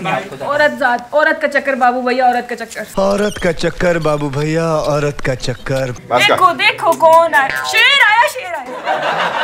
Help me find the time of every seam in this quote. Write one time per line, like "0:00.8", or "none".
0:06.0